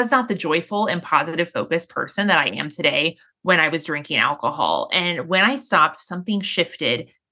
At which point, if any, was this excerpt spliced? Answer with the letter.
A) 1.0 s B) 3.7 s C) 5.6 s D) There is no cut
D